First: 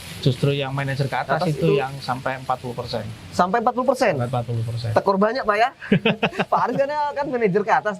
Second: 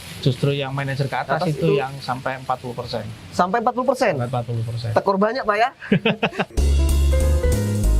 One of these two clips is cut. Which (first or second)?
second